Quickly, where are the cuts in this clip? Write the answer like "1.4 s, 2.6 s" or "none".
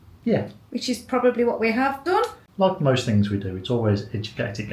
2.4 s